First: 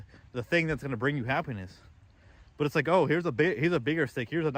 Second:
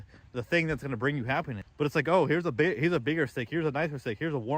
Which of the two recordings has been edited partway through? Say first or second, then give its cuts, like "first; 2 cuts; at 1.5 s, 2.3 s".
second; 1 cut; at 1.6 s